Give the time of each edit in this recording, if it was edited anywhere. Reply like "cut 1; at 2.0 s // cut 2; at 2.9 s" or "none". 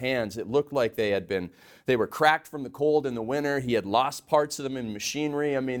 none